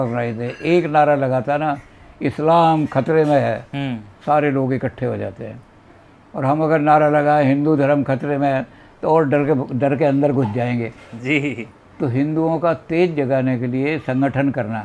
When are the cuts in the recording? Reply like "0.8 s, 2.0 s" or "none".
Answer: none